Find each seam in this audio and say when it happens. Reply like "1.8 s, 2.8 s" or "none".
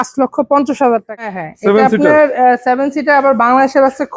1.2 s